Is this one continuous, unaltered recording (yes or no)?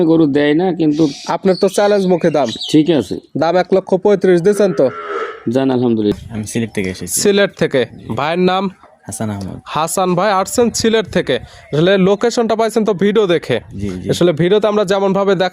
no